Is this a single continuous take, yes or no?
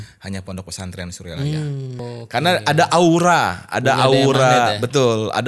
no